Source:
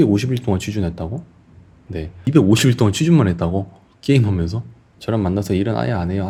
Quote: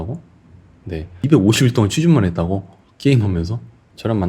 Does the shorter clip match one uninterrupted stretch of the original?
yes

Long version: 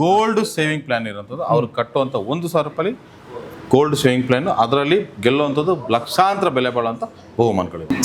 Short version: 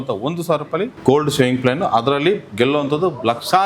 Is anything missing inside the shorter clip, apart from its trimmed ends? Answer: yes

